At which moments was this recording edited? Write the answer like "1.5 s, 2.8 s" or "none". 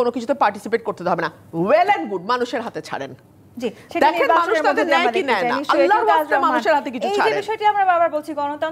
none